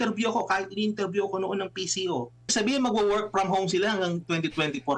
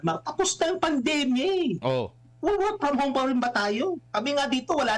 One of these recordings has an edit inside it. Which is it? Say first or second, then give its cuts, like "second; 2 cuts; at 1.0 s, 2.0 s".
first; 1 cut; at 2.5 s